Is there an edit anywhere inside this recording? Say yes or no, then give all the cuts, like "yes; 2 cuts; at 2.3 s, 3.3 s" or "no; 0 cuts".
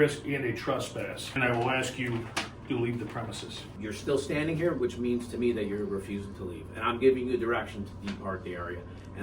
yes; 2 cuts; at 1.4 s, 3.7 s